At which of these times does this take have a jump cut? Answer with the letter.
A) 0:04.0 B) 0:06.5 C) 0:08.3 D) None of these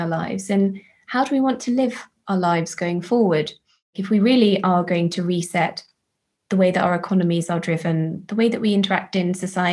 A